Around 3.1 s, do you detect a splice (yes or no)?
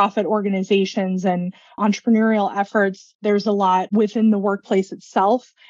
yes